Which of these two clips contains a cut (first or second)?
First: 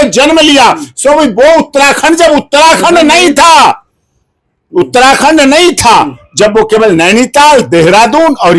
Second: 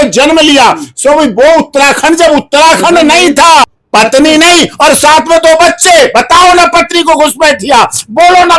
second